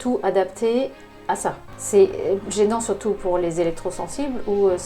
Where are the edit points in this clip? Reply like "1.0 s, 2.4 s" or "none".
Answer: 1.7 s